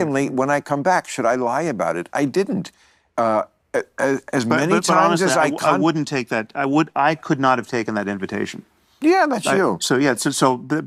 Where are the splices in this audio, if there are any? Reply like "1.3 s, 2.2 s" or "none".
none